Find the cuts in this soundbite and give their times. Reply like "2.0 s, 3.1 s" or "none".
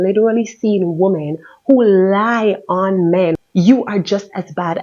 3.4 s